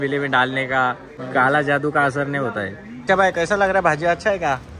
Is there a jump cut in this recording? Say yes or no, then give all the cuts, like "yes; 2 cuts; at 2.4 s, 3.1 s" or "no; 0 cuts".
yes; 2 cuts; at 1.1 s, 3.0 s